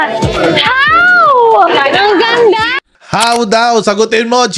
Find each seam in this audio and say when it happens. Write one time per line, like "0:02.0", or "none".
0:03.0